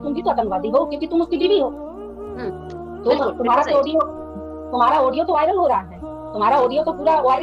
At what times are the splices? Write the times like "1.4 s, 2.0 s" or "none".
none

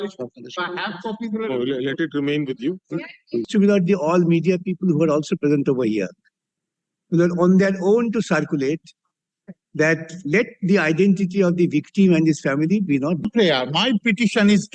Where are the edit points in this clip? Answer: 3.5 s, 13.3 s

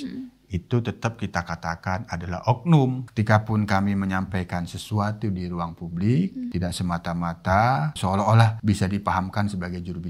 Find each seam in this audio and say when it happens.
3.0 s, 6.5 s, 8.4 s

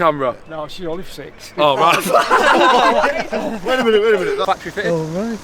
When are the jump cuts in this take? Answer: 4.4 s

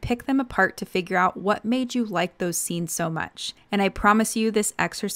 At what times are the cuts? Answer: none

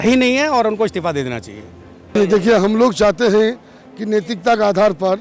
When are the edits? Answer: none

